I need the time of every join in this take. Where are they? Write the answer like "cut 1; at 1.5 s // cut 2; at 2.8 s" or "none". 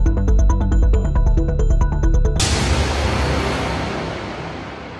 cut 1; at 2.3 s